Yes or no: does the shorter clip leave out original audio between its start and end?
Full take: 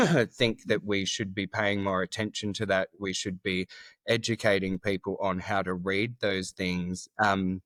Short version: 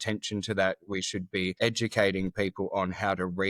yes